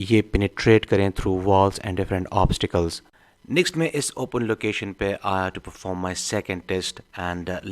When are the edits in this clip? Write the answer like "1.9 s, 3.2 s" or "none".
3.1 s